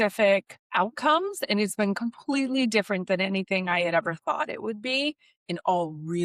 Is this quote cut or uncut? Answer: uncut